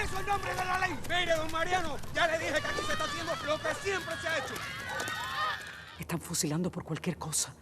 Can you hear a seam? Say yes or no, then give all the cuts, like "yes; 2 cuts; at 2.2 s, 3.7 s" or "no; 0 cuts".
yes; 1 cut; at 5.7 s